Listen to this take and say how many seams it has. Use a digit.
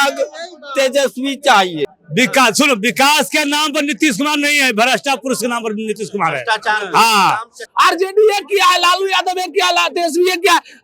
2